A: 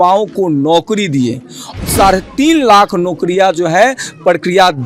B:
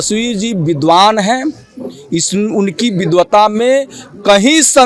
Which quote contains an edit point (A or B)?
A